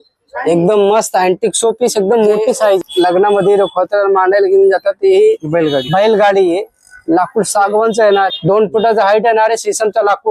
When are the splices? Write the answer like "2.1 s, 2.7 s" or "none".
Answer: 2.8 s, 8.3 s